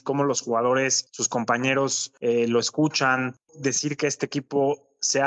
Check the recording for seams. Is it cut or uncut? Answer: cut